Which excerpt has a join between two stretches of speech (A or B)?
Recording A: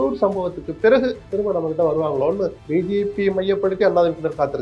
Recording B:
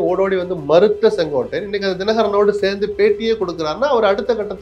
A